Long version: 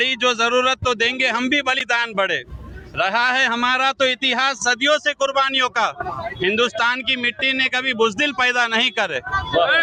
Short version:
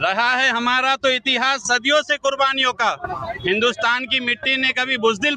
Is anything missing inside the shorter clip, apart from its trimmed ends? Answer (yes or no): no